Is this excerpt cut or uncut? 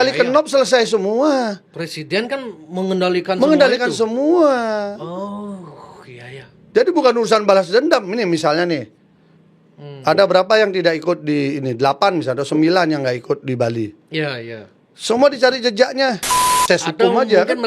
cut